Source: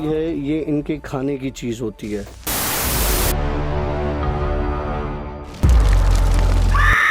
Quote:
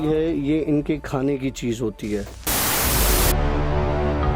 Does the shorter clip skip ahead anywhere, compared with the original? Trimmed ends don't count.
no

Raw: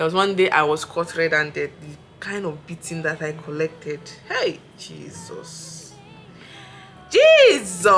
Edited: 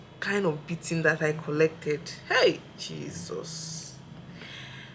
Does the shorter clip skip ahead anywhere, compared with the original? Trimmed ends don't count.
no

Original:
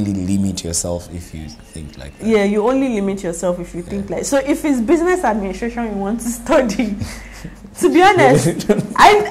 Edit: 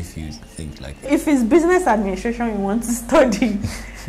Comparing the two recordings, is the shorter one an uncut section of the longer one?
no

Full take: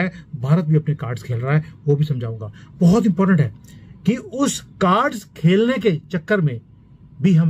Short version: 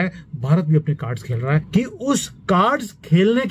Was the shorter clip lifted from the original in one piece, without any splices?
no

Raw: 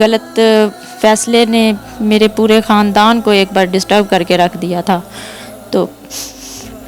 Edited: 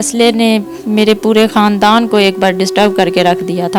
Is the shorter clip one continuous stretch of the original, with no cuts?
yes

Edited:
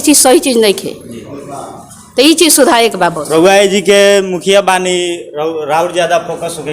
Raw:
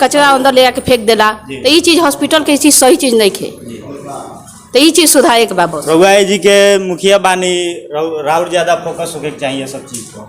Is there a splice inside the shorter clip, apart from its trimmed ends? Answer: no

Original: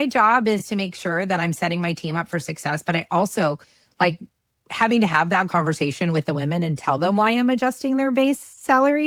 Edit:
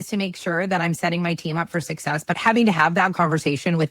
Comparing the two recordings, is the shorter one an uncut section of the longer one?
no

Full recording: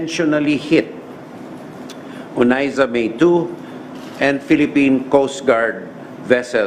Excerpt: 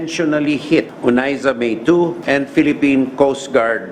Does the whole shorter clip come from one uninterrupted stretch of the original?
no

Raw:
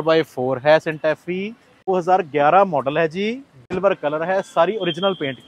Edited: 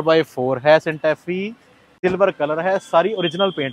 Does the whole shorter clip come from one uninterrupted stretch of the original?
no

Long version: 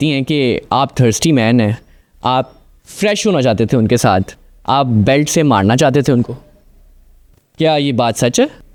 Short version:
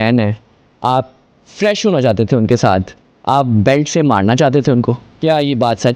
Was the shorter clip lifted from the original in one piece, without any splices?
no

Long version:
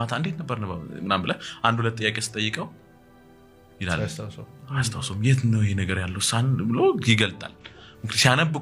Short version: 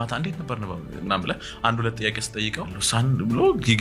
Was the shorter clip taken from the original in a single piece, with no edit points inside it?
no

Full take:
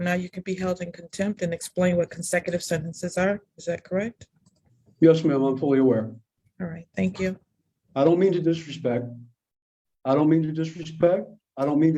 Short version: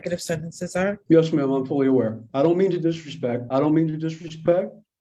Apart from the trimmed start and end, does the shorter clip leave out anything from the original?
yes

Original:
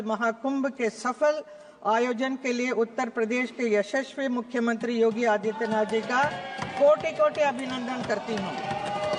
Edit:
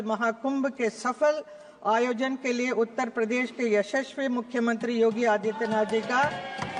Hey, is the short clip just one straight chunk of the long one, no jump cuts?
yes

